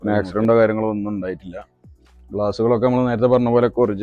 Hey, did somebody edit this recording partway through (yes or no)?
no